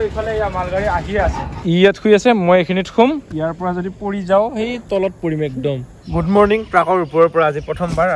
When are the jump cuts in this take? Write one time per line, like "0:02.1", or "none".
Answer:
0:01.5
0:03.3
0:05.9